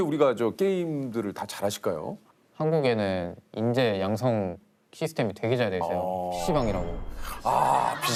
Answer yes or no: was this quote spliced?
no